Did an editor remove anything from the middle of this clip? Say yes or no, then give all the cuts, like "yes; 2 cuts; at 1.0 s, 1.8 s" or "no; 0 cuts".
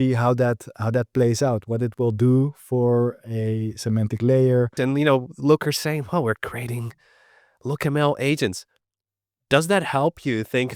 yes; 1 cut; at 4.8 s